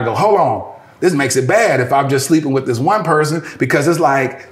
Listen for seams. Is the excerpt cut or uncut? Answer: uncut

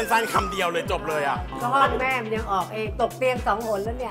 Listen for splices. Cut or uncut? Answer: cut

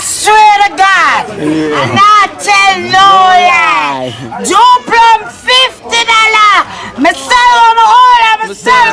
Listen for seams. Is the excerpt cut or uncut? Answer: uncut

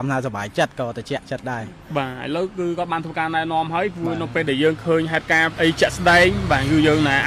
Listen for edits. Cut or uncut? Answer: cut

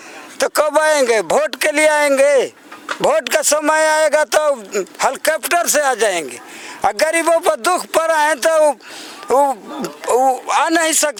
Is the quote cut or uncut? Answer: uncut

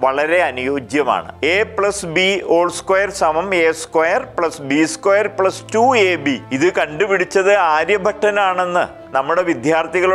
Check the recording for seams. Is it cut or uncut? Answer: cut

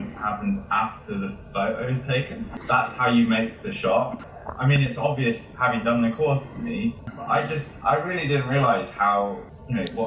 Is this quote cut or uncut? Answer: cut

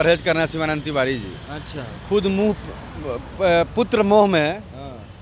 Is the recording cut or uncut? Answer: uncut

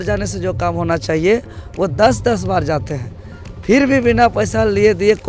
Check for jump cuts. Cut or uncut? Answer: uncut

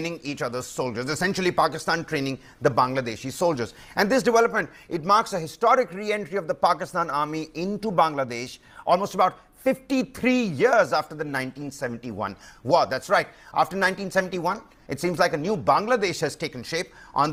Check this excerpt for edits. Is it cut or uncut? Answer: uncut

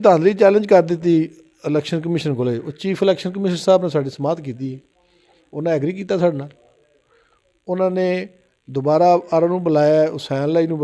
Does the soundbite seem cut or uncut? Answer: uncut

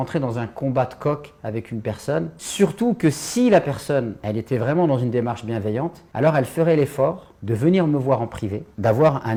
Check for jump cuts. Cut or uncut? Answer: uncut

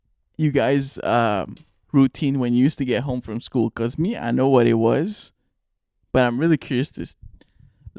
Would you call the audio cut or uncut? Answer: uncut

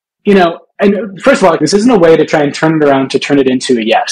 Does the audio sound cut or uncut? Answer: cut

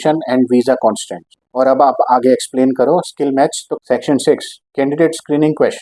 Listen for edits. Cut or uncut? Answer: cut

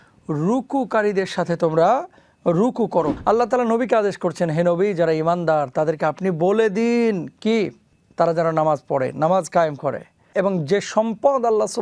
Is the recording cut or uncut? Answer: cut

